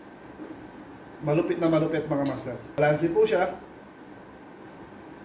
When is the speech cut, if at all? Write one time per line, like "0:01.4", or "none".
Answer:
0:02.8